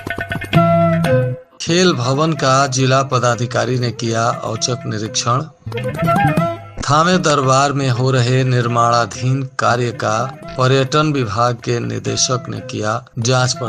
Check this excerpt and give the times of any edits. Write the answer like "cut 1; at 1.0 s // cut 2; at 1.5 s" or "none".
cut 1; at 1.4 s